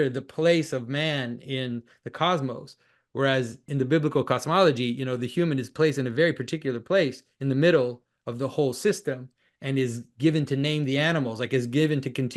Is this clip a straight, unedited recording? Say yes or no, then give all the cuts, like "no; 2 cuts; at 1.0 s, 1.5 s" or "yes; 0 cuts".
no; 1 cut; at 3.7 s